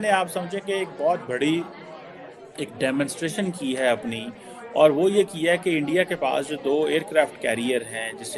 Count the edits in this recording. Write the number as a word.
zero